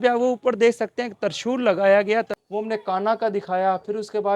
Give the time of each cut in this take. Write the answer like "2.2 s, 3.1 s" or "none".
2.4 s